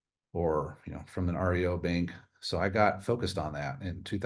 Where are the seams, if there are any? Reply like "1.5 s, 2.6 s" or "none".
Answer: none